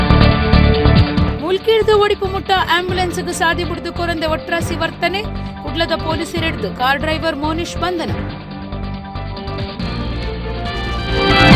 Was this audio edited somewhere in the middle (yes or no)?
no